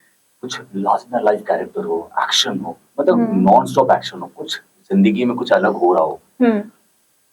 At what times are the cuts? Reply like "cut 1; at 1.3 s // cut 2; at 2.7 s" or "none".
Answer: none